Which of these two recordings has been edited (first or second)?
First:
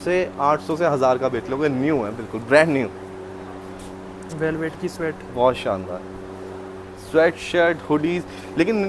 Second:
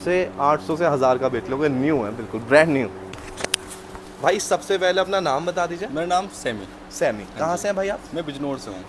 second